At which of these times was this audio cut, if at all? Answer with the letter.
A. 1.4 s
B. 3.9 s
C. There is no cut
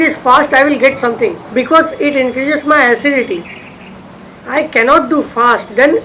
A